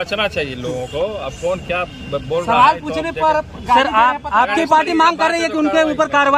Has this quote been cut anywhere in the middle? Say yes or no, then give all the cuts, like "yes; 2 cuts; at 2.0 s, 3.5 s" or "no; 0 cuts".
no; 0 cuts